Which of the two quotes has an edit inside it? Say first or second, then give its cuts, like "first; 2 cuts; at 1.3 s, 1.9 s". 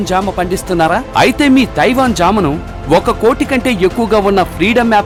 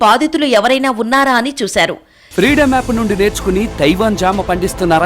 second; 1 cut; at 2.2 s